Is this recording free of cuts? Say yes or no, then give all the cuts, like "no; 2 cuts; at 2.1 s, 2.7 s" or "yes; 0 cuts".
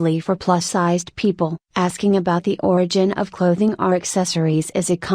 no; 1 cut; at 1.1 s